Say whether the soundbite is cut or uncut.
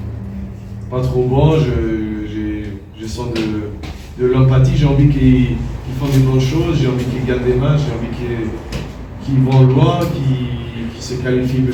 uncut